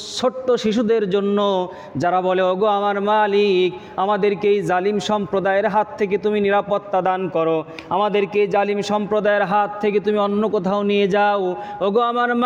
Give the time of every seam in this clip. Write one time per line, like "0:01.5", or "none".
none